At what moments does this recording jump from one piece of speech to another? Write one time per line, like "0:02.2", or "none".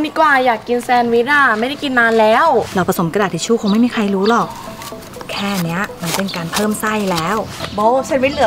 0:02.7
0:07.6